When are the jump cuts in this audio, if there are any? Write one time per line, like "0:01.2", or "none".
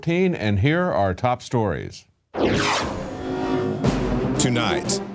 none